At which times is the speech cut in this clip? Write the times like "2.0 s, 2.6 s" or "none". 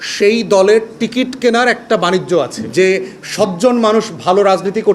2.7 s